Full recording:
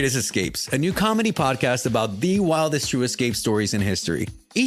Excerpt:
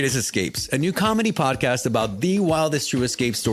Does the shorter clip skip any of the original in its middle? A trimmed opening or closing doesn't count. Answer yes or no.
no